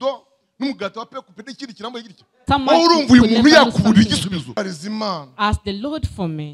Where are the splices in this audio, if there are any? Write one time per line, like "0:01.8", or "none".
0:02.3
0:04.5